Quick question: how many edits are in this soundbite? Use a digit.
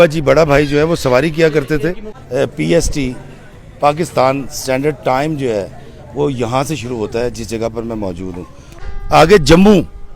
2